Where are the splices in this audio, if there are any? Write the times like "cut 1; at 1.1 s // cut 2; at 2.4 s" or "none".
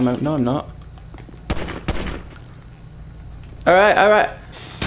none

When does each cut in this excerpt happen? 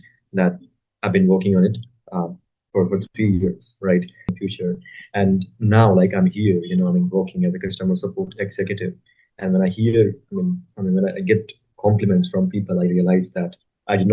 cut 1; at 4.4 s

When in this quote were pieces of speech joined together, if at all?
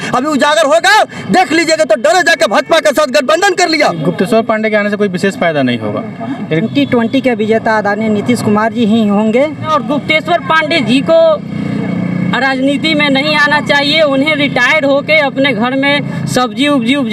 cut 1; at 4.1 s // cut 2; at 6.7 s // cut 3; at 9.7 s

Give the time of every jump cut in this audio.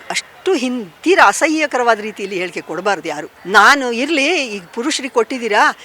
cut 1; at 3.3 s

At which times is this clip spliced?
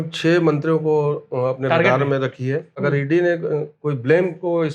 cut 1; at 2.7 s

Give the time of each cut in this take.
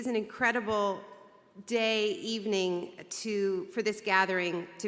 none

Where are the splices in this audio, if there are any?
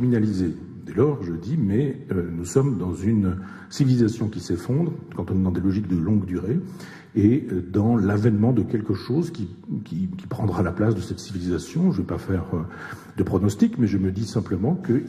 cut 1; at 2.9 s

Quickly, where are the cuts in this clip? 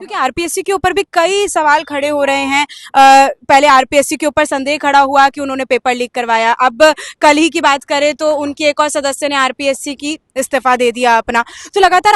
none

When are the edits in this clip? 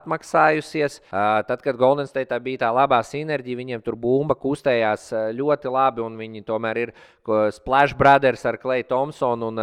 cut 1; at 1.0 s

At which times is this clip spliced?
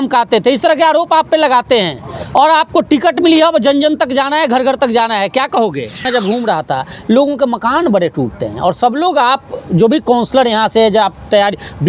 cut 1; at 6.0 s

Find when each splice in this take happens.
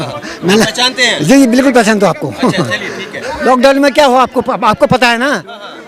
cut 1; at 3.4 s

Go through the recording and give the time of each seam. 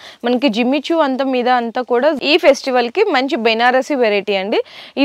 cut 1; at 2.2 s

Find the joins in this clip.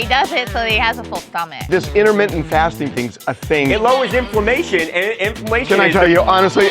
cut 1; at 1.6 s // cut 2; at 3.7 s // cut 3; at 5.6 s

